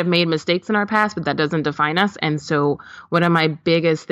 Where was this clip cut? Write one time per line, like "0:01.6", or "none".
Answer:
none